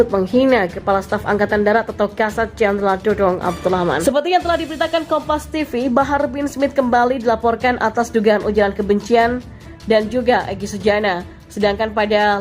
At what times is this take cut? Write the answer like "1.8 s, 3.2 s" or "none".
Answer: 4.1 s